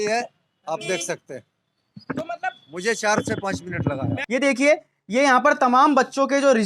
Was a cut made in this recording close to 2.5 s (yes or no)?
no